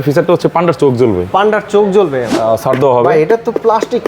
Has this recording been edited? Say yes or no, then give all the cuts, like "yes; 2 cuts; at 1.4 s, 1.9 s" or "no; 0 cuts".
yes; 1 cut; at 2.3 s